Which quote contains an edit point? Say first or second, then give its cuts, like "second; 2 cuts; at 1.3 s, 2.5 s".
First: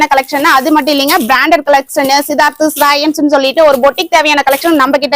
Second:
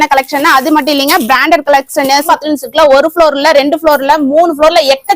second; 1 cut; at 2.3 s